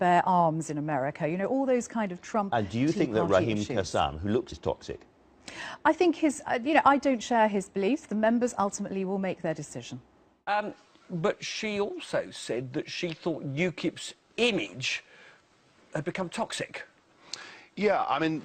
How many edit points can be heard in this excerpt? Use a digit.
0